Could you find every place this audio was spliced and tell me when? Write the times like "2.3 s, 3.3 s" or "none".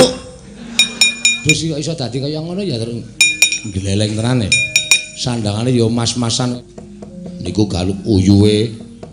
1.3 s, 6.5 s

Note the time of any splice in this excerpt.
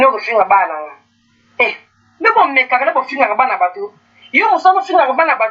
none

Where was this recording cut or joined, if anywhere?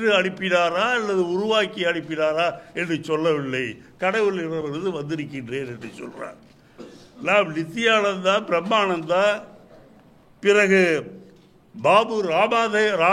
none

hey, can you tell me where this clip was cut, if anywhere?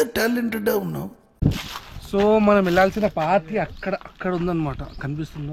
1.2 s

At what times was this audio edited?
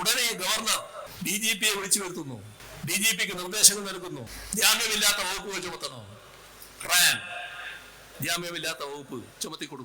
1.1 s, 2.6 s, 4.4 s

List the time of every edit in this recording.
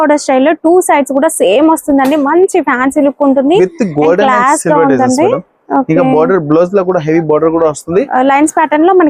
none

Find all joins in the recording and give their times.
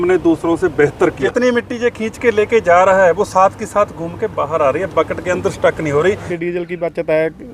1.2 s, 6.3 s

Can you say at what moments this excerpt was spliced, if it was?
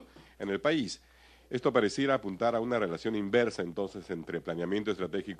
4.2 s

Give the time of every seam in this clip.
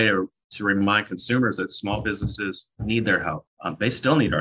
2.7 s, 3.5 s

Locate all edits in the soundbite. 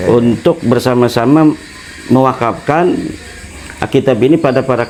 none

